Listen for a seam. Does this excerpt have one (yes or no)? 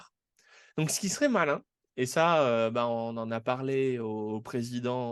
no